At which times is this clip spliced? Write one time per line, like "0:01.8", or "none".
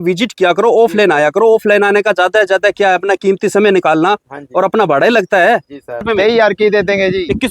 0:06.0